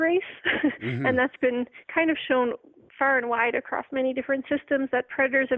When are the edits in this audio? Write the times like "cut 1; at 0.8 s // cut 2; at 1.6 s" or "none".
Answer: cut 1; at 1.8 s

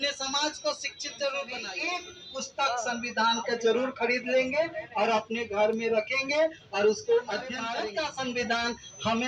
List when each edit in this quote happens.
cut 1; at 1.6 s // cut 2; at 7.6 s

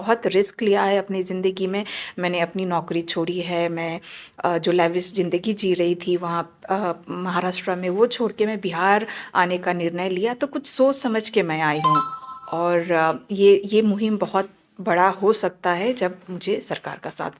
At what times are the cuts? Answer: none

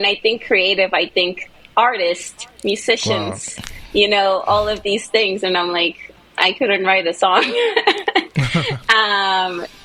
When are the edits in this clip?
none

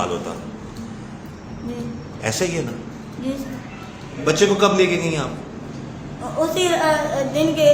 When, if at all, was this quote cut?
cut 1; at 4.1 s

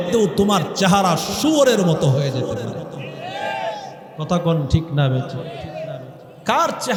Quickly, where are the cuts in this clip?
none

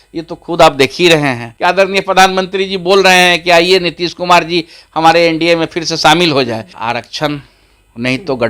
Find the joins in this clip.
cut 1; at 1.5 s // cut 2; at 6.7 s

